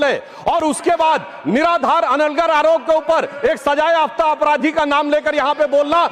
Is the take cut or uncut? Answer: uncut